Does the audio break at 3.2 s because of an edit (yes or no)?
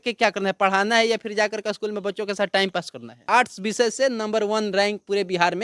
yes